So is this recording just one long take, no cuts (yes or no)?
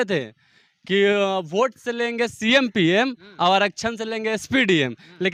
yes